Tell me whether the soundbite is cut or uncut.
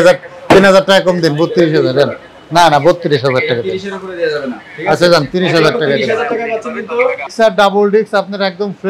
cut